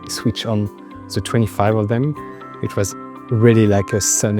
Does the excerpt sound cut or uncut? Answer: uncut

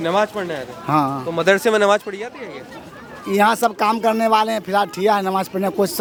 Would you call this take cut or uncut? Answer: uncut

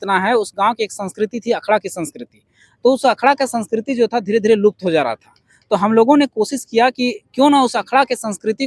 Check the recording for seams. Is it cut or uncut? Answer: uncut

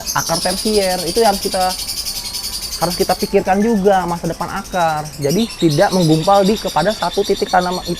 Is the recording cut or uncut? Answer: uncut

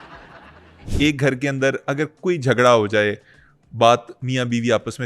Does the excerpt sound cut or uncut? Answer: cut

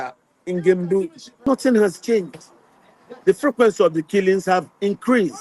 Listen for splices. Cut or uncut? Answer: cut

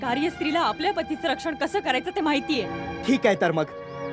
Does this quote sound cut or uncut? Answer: cut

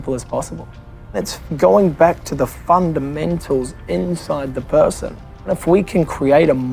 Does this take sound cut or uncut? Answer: cut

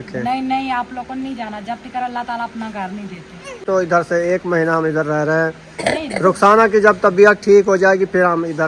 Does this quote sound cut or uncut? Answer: cut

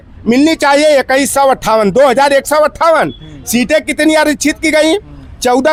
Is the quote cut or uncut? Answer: uncut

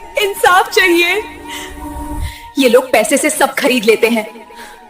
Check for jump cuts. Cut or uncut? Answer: cut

